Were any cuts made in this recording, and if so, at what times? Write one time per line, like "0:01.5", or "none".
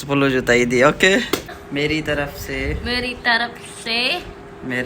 0:01.6